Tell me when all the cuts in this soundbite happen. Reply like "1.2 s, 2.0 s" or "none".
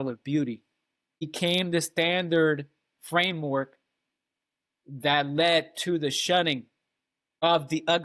1.3 s